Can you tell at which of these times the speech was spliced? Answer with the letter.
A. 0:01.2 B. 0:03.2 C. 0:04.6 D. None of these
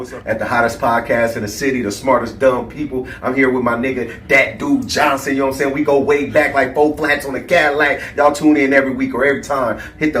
C